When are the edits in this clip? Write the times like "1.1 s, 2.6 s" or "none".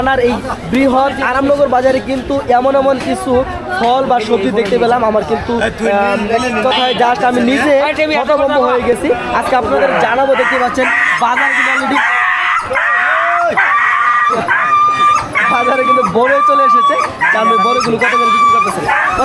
none